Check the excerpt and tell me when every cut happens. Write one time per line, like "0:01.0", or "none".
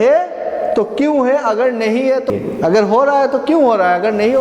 0:02.3